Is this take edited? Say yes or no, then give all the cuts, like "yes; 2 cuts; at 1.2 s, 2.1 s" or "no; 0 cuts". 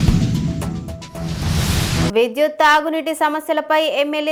no; 0 cuts